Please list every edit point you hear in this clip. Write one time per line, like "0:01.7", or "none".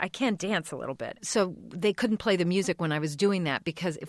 0:01.2